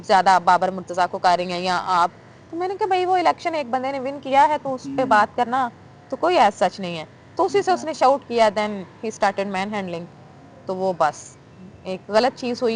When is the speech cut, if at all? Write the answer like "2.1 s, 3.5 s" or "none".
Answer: none